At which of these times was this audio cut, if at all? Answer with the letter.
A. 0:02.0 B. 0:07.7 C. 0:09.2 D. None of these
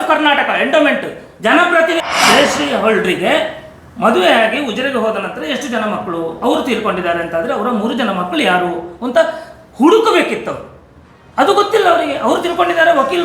A